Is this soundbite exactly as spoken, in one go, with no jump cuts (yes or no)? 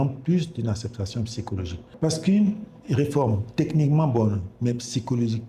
no